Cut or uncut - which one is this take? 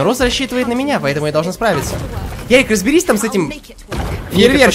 uncut